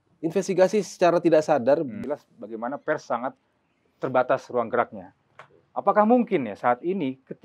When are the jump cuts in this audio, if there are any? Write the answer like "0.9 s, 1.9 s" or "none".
2.0 s